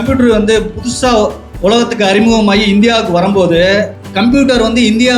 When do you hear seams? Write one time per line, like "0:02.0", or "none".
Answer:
0:01.5
0:04.0